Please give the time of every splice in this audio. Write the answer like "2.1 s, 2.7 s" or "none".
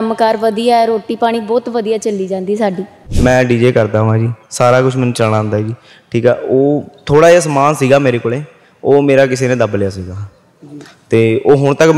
3.0 s

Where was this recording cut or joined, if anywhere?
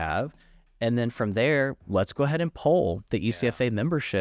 none

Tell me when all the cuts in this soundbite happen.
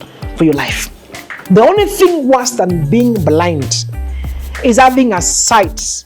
1.3 s

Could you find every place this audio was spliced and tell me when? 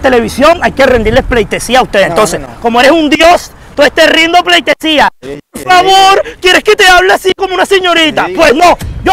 none

